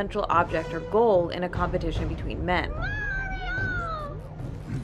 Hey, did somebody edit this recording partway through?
yes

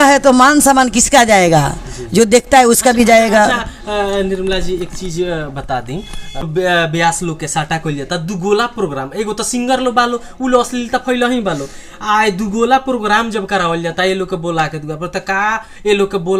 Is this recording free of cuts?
yes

